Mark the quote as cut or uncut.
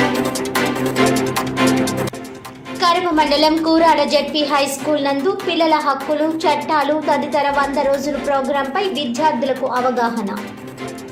uncut